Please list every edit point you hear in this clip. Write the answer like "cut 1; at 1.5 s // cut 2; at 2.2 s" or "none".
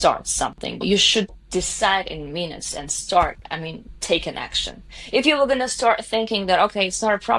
cut 1; at 1.3 s